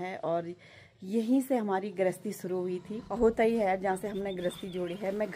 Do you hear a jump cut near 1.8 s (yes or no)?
no